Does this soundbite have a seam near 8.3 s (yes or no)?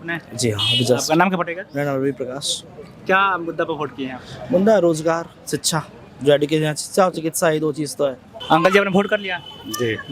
yes